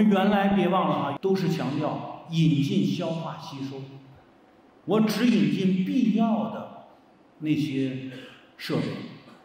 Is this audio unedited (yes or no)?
no